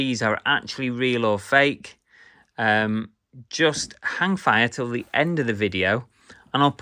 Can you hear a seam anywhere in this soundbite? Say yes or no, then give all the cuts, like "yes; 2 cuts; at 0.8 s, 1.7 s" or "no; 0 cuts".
no; 0 cuts